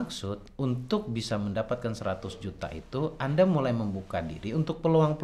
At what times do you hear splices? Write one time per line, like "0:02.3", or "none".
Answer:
none